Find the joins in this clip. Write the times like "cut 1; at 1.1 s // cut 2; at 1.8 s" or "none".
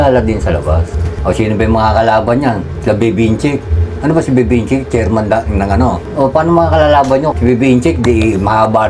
cut 1; at 1.1 s // cut 2; at 6.0 s // cut 3; at 7.3 s